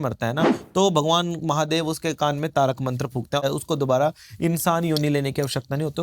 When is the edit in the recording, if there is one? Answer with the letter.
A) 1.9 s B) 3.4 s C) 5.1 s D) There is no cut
B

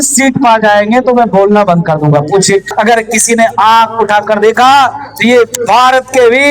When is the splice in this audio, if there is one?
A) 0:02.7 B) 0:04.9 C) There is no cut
A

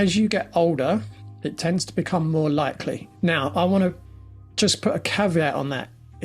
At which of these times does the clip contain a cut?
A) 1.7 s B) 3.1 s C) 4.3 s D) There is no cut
B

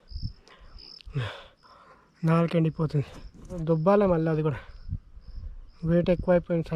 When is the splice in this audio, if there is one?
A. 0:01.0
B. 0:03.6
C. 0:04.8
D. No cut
B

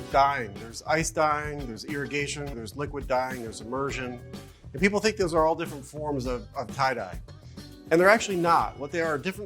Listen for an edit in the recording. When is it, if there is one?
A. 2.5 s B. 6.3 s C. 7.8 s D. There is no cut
A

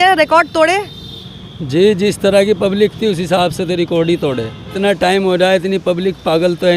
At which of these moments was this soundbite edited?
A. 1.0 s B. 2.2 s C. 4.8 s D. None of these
C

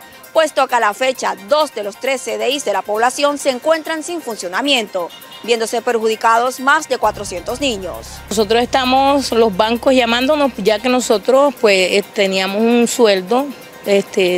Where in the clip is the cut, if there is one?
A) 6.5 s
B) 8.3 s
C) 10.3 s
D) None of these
B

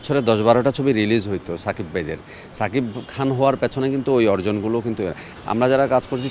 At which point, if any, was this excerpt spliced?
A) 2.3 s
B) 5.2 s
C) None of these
B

